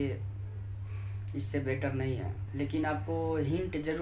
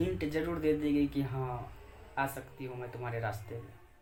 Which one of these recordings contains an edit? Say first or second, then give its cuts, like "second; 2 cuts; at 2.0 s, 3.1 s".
first; 1 cut; at 2.4 s